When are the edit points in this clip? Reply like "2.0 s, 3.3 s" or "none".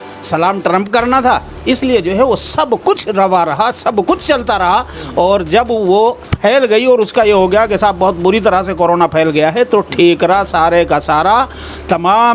6.3 s